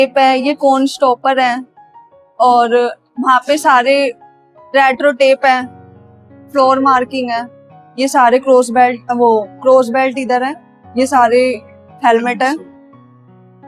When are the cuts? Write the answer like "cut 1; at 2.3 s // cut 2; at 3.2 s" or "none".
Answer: none